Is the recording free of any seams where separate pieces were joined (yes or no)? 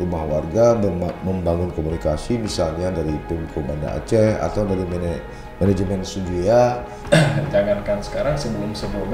no